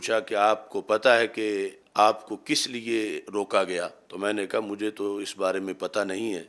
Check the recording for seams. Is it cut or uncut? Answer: cut